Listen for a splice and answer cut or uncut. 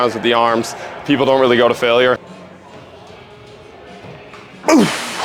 cut